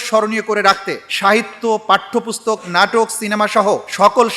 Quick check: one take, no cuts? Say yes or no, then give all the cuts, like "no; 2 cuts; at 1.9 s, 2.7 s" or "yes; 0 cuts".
yes; 0 cuts